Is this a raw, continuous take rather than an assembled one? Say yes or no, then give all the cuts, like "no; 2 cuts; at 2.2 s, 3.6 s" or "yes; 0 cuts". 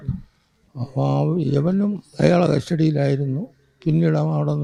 yes; 0 cuts